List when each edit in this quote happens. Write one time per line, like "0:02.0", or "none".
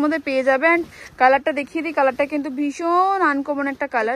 none